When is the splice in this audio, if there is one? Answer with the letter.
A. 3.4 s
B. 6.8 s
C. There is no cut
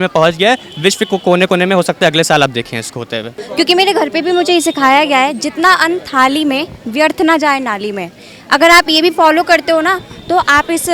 A